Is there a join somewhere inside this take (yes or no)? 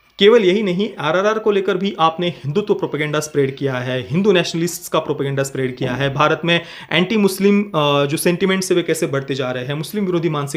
no